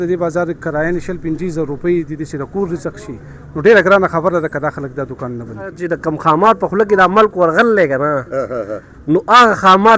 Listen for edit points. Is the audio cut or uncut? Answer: cut